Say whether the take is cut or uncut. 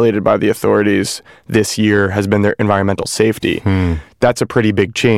uncut